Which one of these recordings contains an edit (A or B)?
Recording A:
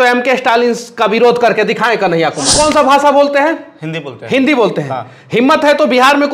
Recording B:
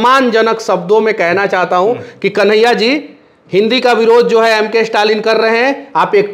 A